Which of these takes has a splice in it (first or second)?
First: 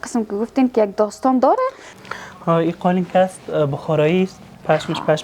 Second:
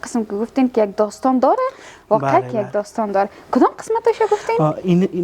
first